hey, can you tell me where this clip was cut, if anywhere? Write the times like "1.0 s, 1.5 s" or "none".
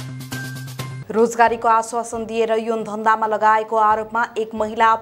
0.9 s